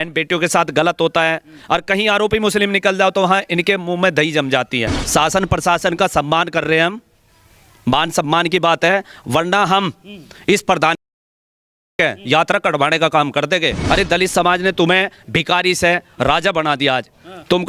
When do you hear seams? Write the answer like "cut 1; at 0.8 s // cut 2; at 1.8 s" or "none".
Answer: cut 1; at 5.0 s // cut 2; at 13.7 s